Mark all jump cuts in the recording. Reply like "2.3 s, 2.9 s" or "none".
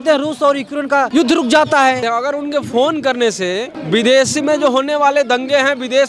1.1 s, 2.0 s, 3.7 s